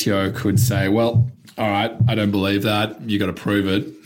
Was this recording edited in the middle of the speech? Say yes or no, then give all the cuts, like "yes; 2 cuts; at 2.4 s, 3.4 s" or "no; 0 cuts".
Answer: no; 0 cuts